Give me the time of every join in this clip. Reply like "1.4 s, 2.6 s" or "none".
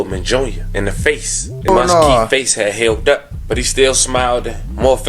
1.7 s